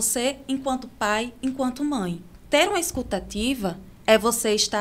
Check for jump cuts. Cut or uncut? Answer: cut